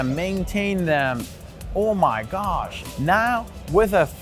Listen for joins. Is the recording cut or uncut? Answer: cut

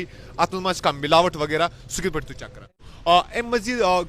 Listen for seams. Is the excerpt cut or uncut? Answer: cut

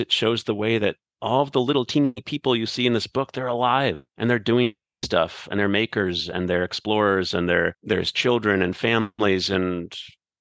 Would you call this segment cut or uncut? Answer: cut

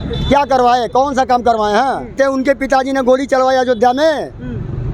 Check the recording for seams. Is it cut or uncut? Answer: cut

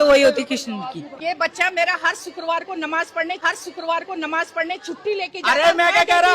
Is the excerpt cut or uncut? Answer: cut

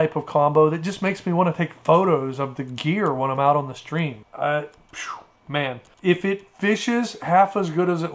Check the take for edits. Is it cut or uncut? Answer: cut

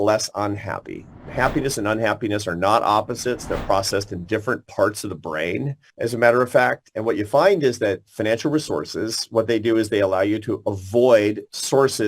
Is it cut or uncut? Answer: cut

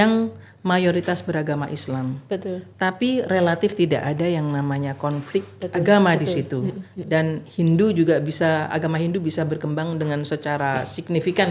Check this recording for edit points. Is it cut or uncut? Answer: uncut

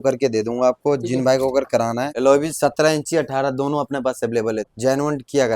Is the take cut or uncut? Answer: cut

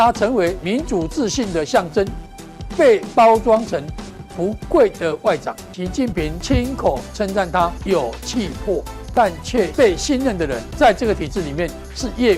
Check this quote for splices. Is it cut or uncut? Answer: cut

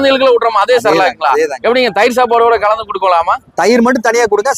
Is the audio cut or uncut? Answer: uncut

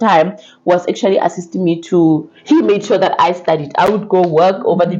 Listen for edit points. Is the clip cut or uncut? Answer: uncut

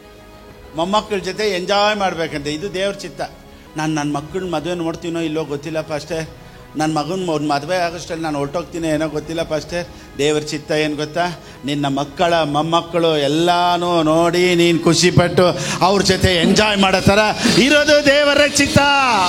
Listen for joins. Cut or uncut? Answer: uncut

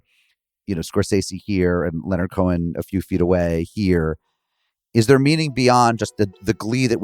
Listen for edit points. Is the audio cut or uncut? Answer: uncut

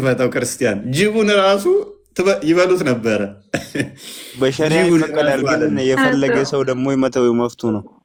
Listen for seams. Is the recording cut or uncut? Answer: uncut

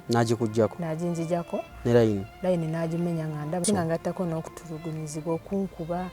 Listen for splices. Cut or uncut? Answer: cut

